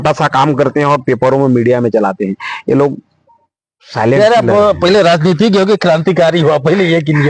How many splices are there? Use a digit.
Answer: 0